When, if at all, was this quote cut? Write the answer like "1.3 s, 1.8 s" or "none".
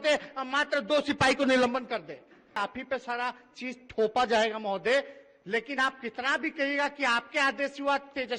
2.5 s